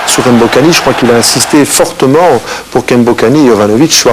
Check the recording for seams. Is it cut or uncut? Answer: uncut